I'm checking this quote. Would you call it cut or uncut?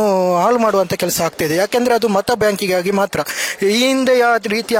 uncut